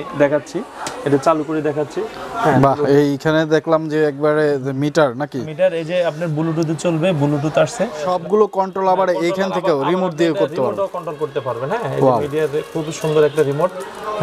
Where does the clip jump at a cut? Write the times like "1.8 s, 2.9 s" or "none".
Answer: 8.1 s